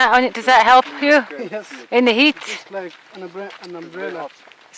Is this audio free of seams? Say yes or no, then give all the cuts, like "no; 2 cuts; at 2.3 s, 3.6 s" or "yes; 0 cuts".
yes; 0 cuts